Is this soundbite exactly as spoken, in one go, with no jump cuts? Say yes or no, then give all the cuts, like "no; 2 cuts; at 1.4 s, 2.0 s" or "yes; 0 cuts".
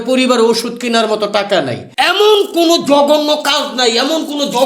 no; 1 cut; at 1.8 s